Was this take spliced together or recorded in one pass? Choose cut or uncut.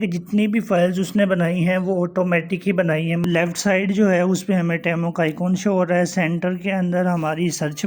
cut